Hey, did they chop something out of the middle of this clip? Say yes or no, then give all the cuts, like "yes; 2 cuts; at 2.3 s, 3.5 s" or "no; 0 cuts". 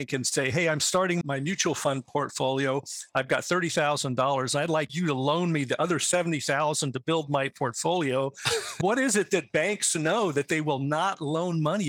yes; 2 cuts; at 1.2 s, 4.9 s